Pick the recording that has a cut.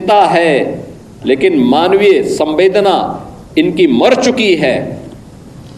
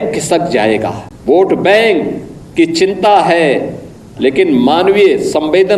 second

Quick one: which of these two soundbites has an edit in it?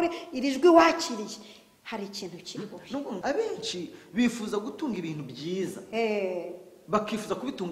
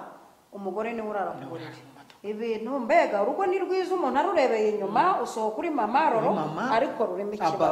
first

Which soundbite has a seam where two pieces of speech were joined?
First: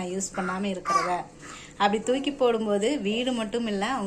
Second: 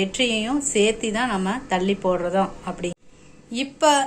second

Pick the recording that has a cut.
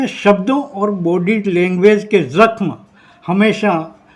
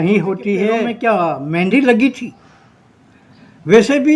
second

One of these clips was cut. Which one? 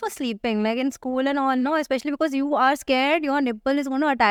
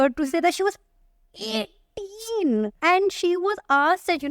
second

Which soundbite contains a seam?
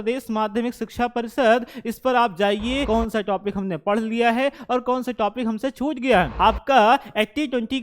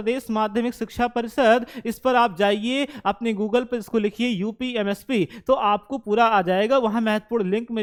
first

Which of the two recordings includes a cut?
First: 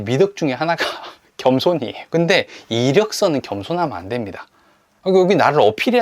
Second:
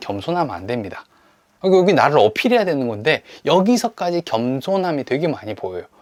first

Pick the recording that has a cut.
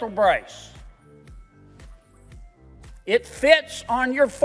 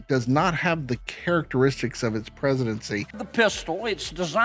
second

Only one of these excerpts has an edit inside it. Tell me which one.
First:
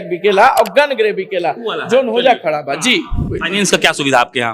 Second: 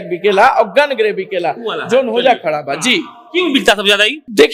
first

